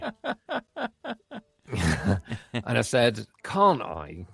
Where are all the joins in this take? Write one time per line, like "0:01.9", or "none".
0:03.3